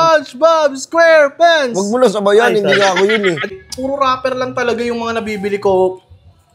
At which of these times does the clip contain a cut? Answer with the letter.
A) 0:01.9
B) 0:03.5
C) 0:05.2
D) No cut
B